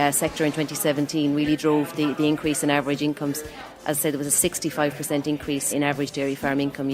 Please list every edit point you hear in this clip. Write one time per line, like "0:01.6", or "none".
0:05.7